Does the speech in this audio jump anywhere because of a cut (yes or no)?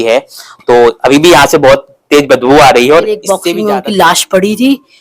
yes